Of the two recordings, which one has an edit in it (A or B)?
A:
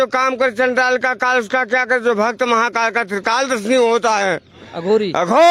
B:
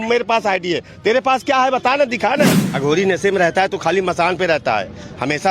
B